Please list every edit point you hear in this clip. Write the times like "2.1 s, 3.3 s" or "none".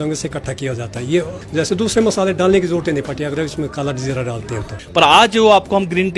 1.4 s, 4.8 s